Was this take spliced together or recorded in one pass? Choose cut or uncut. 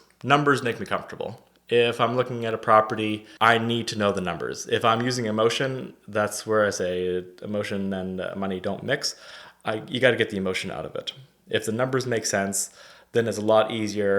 cut